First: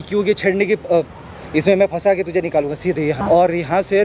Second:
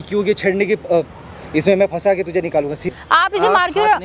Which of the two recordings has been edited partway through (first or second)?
second